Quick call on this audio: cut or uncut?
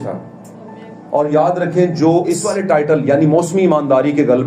cut